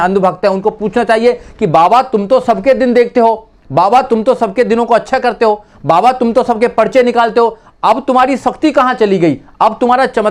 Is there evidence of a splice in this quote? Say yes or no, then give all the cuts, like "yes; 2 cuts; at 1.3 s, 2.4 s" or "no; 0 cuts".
no; 0 cuts